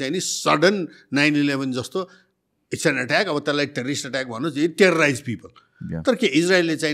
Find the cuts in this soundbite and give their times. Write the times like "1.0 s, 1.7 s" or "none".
none